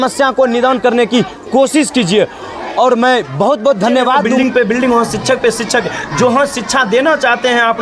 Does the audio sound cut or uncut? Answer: cut